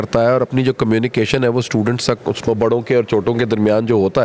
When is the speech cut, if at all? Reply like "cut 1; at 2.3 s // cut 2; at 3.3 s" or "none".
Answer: cut 1; at 2.5 s